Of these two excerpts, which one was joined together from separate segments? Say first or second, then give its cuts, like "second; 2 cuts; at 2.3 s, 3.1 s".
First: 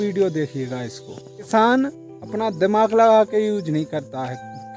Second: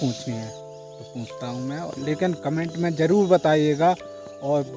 first; 1 cut; at 1.5 s